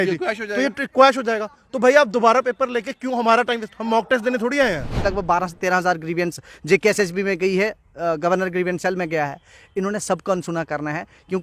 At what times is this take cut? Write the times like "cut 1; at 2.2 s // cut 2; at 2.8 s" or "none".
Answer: cut 1; at 5.0 s